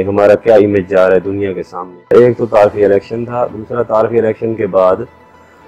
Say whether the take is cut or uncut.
cut